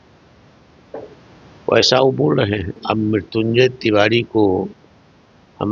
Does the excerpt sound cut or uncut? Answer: cut